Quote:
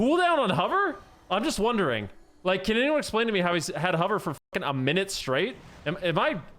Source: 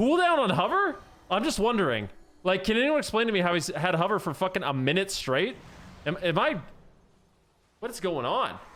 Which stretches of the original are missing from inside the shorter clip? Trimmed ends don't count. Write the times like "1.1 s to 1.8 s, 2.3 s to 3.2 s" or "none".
5.7 s to 5.9 s